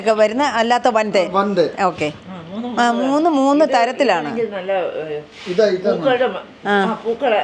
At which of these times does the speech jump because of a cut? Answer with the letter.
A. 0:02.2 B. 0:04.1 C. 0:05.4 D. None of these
A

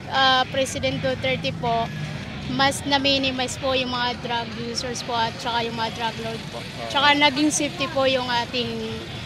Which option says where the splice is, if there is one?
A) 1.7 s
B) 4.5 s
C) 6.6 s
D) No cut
D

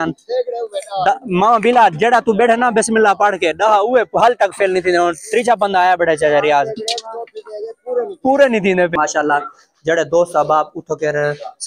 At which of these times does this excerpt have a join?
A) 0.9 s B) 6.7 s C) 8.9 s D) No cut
C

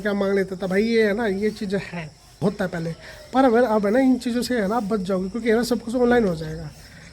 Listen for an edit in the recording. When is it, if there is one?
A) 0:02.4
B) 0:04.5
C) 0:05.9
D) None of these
A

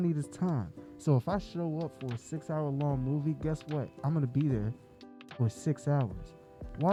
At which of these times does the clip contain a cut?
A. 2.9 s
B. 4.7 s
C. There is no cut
C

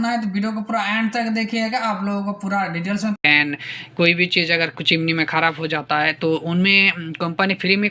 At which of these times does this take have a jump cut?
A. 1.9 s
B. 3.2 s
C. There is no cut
B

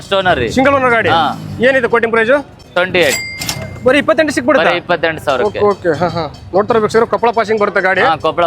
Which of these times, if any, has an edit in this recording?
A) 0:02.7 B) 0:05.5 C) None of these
A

